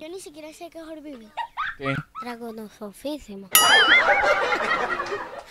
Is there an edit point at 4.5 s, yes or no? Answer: no